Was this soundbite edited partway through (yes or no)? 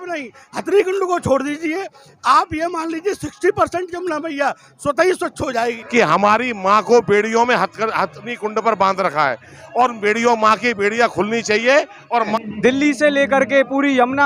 yes